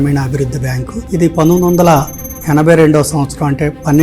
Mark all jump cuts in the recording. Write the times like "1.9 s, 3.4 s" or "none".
0.9 s